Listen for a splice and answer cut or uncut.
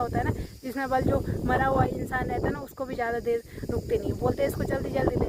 uncut